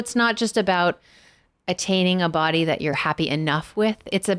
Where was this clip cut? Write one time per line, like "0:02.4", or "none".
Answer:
0:03.0